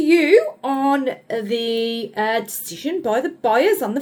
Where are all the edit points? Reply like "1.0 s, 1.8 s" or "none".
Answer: none

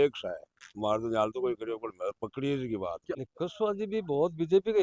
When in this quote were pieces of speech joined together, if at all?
3.2 s

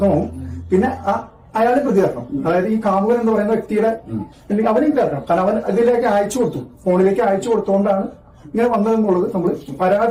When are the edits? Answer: none

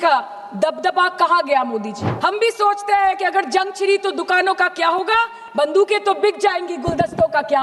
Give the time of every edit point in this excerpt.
2.0 s

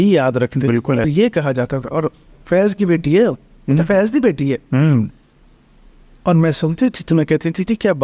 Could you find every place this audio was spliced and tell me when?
1.1 s

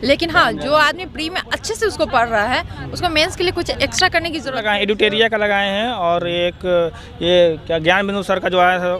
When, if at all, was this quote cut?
4.5 s

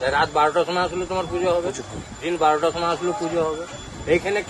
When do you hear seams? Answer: none

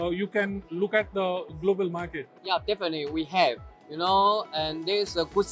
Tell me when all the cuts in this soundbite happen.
2.3 s

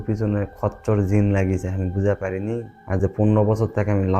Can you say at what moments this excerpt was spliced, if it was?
none

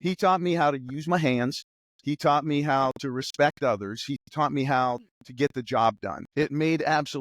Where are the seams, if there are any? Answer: 6.1 s

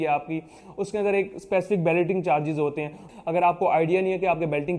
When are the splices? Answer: 3.0 s

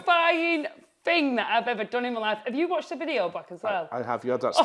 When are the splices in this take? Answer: none

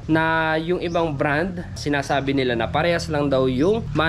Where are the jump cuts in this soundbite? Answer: none

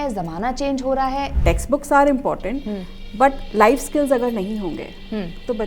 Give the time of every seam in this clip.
1.3 s

